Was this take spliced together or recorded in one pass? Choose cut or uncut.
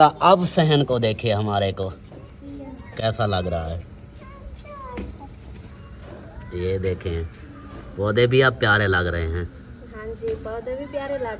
uncut